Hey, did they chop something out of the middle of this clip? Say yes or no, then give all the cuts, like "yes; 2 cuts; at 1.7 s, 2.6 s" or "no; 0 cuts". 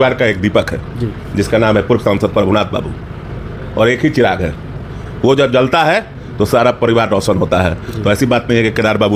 no; 0 cuts